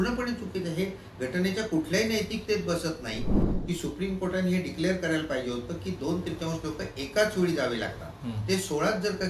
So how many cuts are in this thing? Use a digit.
1